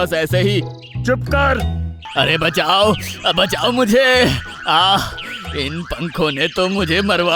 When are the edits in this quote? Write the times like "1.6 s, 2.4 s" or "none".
2.0 s